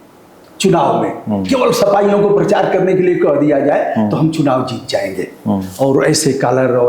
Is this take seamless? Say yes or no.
yes